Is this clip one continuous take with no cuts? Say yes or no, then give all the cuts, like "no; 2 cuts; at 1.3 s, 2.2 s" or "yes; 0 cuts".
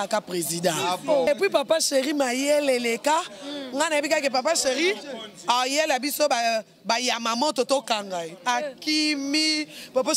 no; 1 cut; at 1.3 s